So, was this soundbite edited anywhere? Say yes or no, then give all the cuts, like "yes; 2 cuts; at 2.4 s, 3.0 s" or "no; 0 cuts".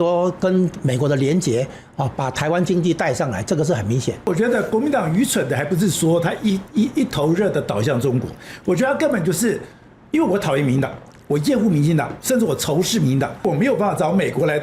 yes; 2 cuts; at 4.3 s, 13.4 s